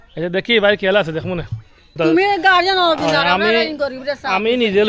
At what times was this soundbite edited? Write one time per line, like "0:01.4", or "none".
0:01.9